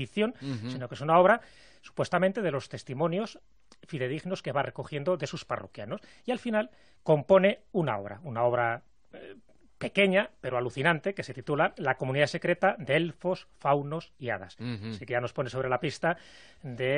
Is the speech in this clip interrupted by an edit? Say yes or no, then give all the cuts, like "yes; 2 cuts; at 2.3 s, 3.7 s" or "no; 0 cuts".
yes; 1 cut; at 11.9 s